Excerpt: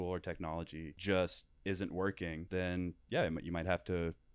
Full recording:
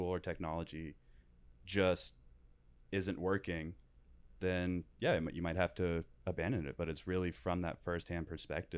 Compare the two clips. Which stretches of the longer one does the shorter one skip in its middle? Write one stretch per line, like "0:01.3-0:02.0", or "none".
0:00.9-0:01.6
0:02.1-0:02.7
0:03.7-0:04.3